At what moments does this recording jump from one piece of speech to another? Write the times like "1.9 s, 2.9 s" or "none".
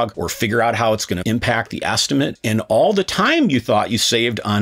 1.2 s, 2.3 s